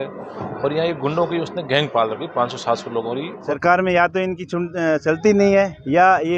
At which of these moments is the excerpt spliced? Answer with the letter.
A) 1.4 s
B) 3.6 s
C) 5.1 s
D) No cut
B